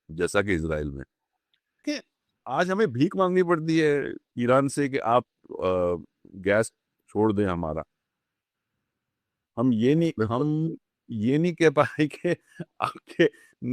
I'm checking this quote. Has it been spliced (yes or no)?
yes